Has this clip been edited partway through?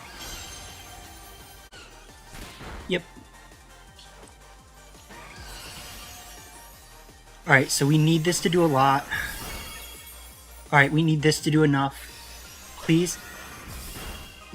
yes; 1 cut; at 1.7 s

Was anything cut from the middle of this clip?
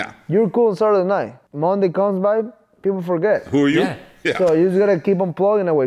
yes; 1 cut; at 1.4 s

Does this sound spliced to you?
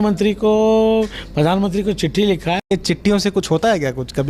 yes; 1 cut; at 2.7 s

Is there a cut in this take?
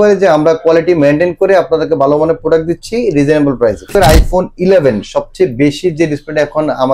yes; 1 cut; at 3.9 s

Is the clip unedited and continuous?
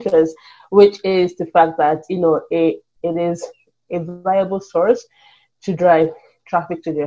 yes; 0 cuts

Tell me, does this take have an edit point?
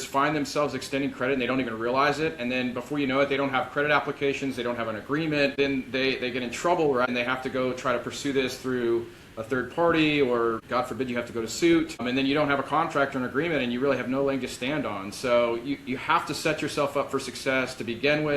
yes; 2 cuts; at 5.5 s, 7.1 s

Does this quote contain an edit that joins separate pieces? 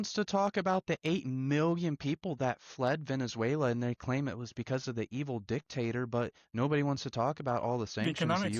no; 0 cuts

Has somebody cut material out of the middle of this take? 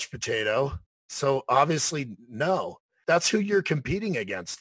yes; 1 cut; at 2.9 s

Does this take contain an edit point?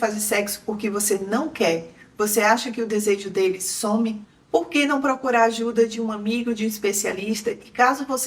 yes; 1 cut; at 4.2 s

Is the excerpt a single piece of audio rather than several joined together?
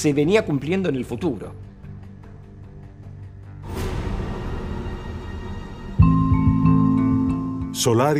yes; 0 cuts

